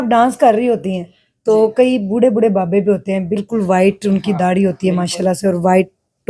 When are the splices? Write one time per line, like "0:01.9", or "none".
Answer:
none